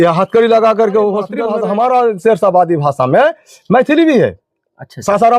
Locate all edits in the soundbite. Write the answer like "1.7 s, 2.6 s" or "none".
1.4 s